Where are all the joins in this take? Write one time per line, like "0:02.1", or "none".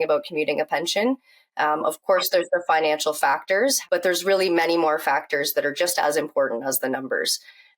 0:03.8

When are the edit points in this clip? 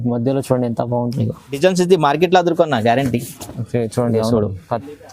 0:01.6

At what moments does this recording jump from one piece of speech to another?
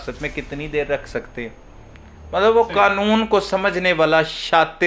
none

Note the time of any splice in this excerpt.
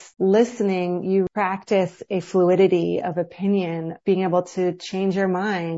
0:01.3
0:03.9

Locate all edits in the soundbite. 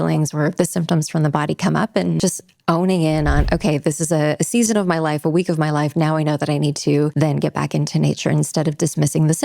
0:02.2
0:07.1

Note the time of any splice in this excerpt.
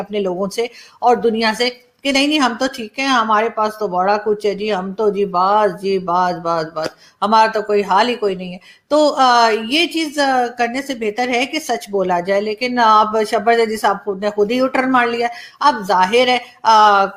none

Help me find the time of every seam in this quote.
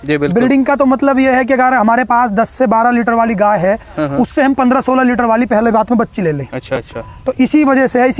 none

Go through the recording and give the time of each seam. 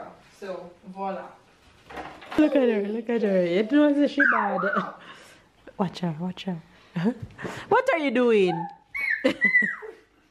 0:02.4

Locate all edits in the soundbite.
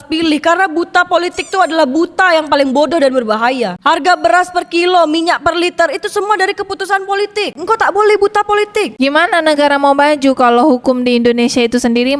0:03.8
0:07.6
0:08.9

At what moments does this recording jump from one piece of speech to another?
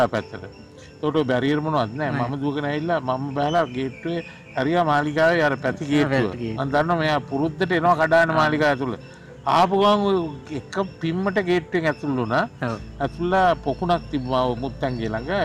none

